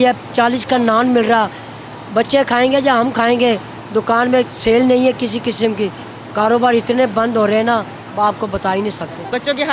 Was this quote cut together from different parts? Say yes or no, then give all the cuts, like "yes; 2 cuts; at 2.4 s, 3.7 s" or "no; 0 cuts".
no; 0 cuts